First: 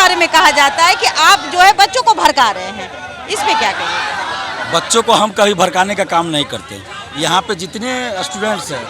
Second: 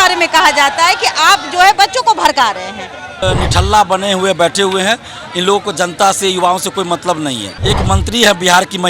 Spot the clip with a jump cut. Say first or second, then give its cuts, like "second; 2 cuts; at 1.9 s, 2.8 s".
second; 2 cuts; at 3.2 s, 7.5 s